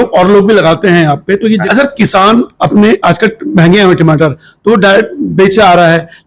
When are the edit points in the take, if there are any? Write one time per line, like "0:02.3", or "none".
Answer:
0:01.6